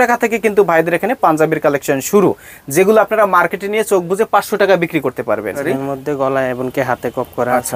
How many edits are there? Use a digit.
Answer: 1